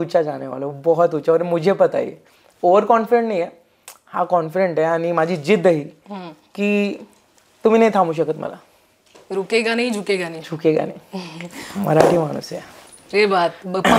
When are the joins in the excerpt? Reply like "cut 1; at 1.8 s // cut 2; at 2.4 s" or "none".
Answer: none

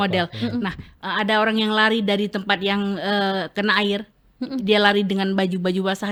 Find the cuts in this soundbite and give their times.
none

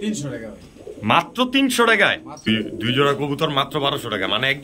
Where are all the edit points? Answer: cut 1; at 2.5 s

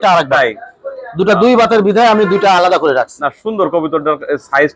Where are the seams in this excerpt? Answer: none

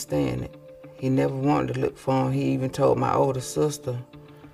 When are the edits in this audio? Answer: none

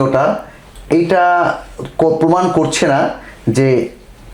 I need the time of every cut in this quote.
none

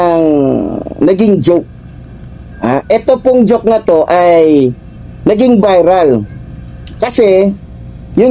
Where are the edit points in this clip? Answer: none

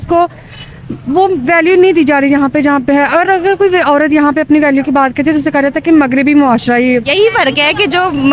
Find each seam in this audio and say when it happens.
cut 1; at 7.1 s

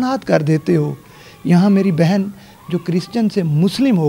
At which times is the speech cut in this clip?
none

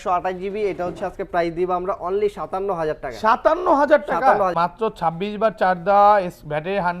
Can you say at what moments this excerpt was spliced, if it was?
cut 1; at 4.5 s

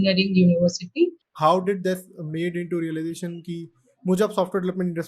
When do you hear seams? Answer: cut 1; at 1.2 s

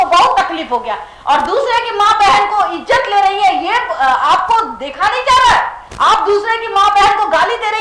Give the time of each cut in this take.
none

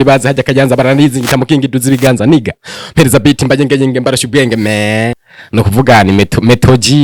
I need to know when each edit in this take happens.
cut 1; at 5.3 s

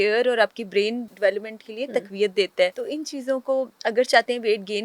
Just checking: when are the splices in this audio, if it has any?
cut 1; at 1.1 s // cut 2; at 2.8 s

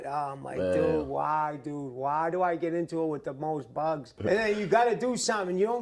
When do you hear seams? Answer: cut 1; at 4.2 s

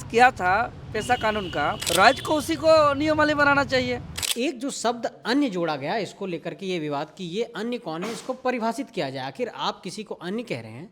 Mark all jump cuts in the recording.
cut 1; at 1.8 s // cut 2; at 4.2 s

